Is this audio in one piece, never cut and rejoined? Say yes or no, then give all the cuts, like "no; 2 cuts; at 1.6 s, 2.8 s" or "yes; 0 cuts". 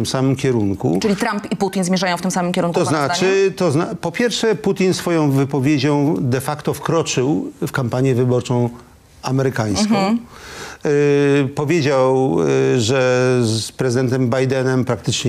yes; 0 cuts